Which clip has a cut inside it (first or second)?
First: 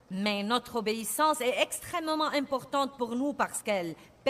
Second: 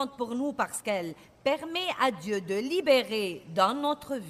first